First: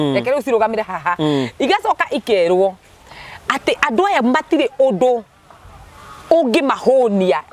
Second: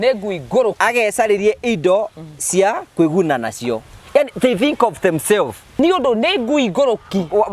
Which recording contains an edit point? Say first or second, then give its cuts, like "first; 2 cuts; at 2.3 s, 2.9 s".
second; 1 cut; at 5.8 s